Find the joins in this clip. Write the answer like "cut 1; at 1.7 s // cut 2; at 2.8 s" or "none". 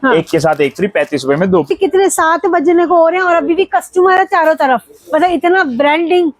cut 1; at 1.7 s